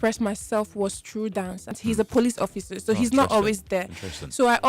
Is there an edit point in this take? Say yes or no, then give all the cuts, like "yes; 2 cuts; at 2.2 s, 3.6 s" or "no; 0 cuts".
yes; 1 cut; at 1.7 s